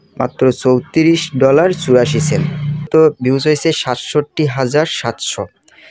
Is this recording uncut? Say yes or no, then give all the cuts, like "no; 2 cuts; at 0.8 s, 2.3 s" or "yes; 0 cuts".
no; 1 cut; at 2.9 s